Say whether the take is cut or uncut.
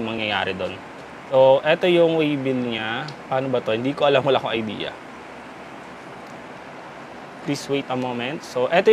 uncut